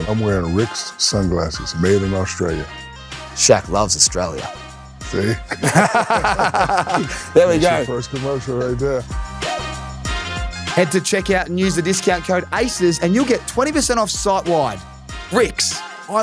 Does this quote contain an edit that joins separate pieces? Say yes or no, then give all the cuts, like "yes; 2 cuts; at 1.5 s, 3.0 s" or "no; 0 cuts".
yes; 2 cuts; at 9.1 s, 10.7 s